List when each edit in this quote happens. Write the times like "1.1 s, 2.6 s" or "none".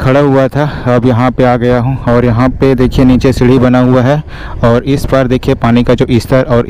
none